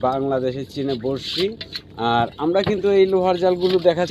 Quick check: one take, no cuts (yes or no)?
yes